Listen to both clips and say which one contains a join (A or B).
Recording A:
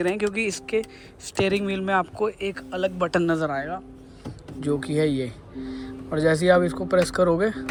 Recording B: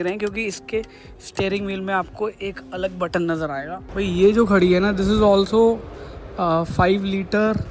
B